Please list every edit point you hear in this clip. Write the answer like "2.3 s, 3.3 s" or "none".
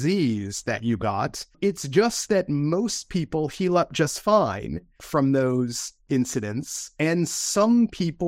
1.6 s, 6.0 s, 6.8 s